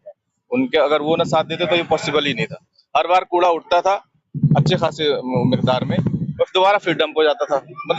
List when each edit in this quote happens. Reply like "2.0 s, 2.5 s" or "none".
none